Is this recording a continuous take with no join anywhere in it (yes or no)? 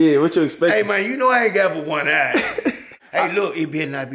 no